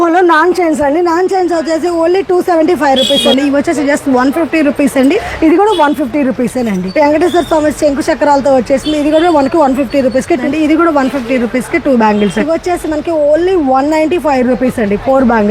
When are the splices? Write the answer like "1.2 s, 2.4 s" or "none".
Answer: 3.3 s, 5.3 s, 6.8 s, 10.4 s, 12.4 s